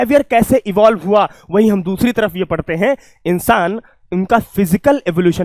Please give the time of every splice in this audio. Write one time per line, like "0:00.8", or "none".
none